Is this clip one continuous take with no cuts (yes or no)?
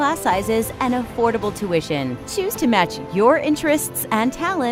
yes